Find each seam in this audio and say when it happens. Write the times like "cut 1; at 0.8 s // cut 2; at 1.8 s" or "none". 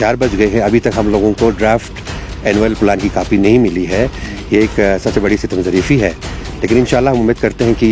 none